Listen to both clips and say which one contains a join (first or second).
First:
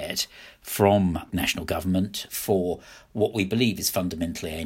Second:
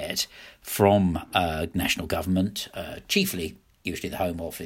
first